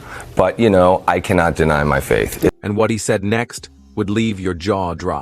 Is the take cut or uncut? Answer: uncut